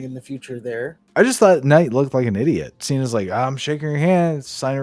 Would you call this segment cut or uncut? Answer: cut